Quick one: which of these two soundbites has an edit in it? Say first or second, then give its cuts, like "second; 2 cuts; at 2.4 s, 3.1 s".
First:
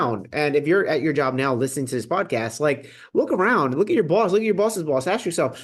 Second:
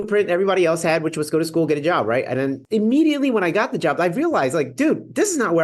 second; 1 cut; at 2.6 s